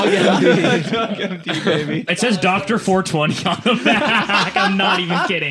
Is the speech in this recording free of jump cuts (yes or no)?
no